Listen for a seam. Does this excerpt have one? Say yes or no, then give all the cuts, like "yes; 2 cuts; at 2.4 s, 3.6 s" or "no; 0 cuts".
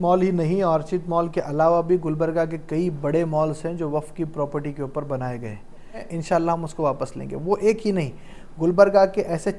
yes; 1 cut; at 6.1 s